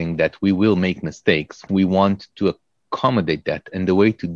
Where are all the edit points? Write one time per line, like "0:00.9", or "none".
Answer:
0:01.6

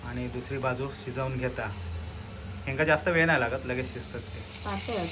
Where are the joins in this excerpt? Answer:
none

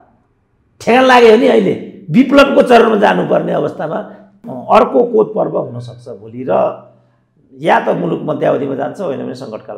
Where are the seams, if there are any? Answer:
0:04.5

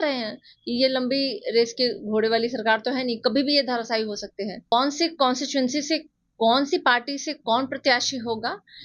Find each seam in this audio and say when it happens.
0:04.7

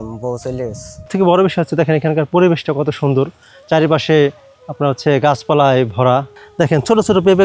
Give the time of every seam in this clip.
0:01.1
0:06.4

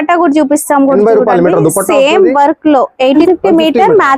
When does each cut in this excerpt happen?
0:03.2

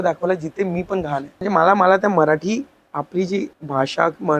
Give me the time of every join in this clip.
0:01.4
0:03.6

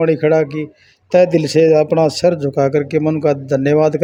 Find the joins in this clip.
none

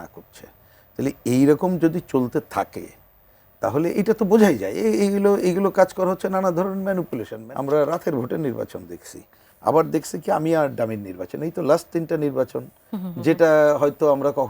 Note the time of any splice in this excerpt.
0:07.3

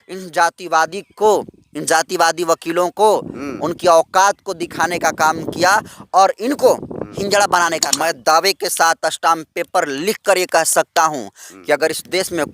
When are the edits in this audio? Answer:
0:07.9

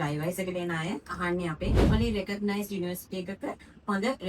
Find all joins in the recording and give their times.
0:01.9

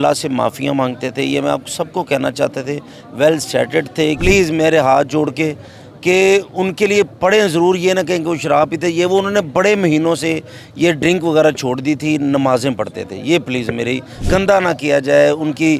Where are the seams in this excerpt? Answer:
0:04.2
0:14.2

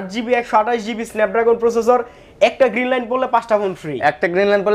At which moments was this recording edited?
none

